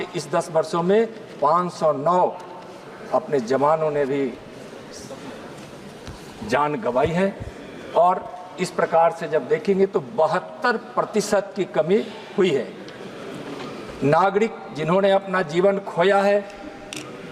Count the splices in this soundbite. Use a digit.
0